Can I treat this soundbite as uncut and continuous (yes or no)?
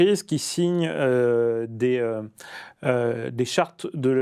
yes